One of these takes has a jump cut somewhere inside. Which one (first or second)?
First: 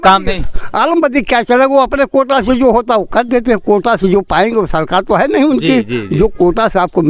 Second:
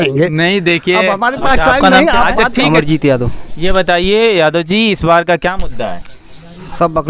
second